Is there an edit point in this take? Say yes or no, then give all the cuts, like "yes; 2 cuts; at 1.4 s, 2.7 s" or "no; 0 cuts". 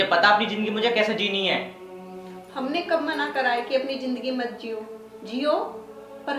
no; 0 cuts